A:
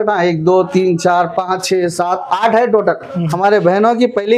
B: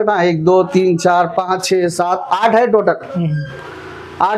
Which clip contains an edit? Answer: A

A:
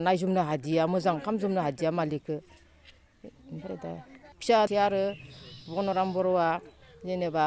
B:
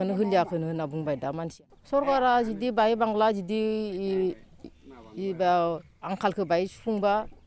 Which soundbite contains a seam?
B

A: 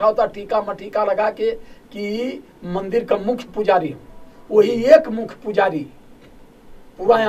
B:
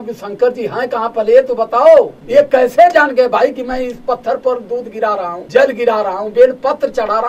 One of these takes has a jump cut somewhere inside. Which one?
B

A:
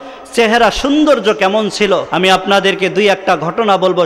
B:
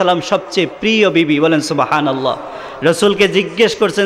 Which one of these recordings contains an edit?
A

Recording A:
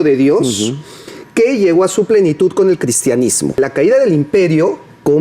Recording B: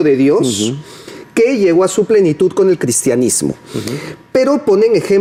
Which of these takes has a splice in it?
A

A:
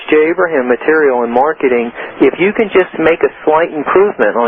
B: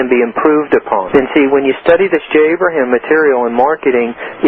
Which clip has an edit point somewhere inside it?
B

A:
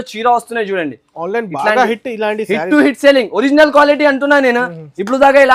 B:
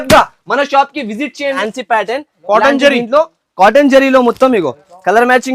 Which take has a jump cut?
B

